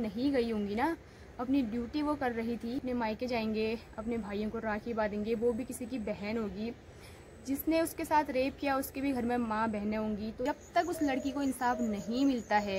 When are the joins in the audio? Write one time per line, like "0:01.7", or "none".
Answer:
0:02.9
0:10.4